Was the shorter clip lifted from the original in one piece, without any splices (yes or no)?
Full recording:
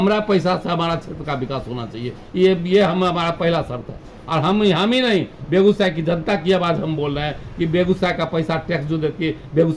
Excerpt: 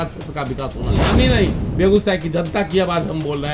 no